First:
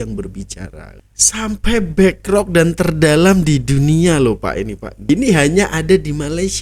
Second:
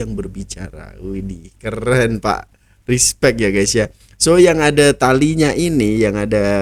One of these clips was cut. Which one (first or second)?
first